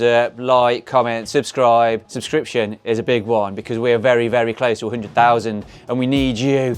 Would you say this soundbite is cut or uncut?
uncut